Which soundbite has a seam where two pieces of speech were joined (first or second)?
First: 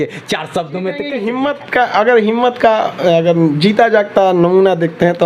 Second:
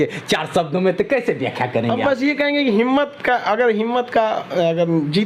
first